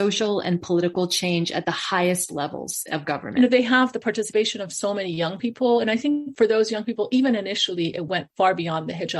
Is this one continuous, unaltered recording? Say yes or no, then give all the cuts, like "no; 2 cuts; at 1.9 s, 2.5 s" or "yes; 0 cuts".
no; 1 cut; at 3.3 s